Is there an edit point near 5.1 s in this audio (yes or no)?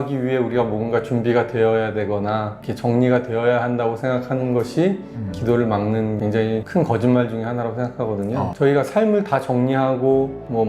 no